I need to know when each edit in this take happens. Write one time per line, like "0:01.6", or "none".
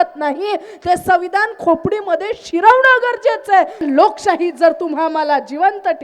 0:03.8